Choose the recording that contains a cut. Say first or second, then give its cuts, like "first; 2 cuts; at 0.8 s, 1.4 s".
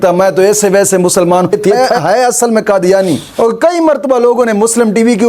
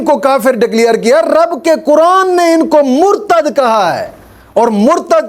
first; 2 cuts; at 1.7 s, 3.3 s